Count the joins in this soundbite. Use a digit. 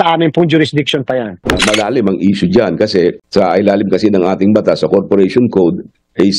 1